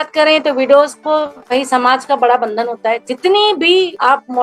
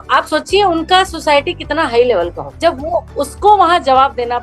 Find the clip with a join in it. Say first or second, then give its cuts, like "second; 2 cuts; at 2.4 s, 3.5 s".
second; 1 cut; at 2.5 s